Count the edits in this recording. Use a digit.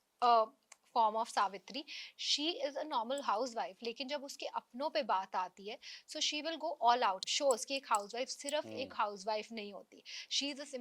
1